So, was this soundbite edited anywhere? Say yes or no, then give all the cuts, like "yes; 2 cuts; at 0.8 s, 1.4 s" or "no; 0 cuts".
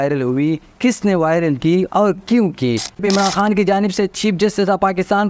yes; 1 cut; at 3.0 s